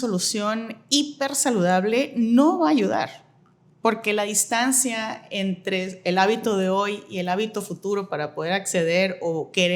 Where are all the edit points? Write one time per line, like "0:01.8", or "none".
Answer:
none

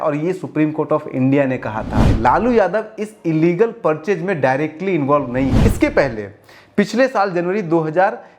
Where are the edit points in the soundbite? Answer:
0:02.1
0:05.6

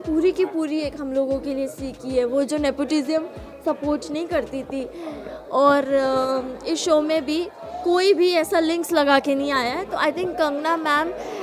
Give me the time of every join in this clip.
none

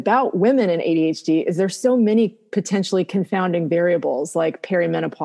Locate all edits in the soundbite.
none

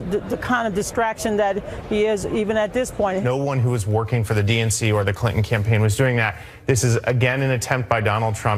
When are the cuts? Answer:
none

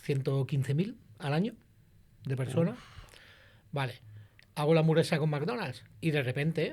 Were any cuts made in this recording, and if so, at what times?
0:05.8

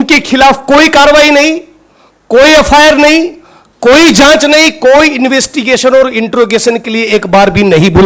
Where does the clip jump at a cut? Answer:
none

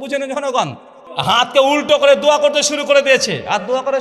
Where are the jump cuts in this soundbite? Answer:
0:01.0

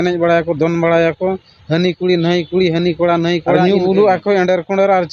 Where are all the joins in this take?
0:03.5

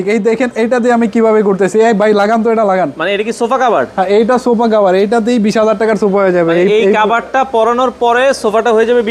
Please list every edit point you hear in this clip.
none

